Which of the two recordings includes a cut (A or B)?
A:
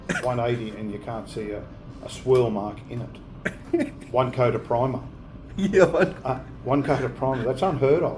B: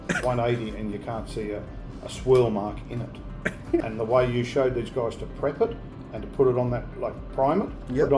B